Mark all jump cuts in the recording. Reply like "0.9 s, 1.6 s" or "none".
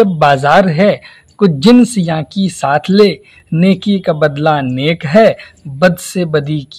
none